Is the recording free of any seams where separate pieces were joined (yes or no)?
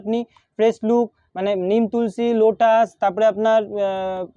yes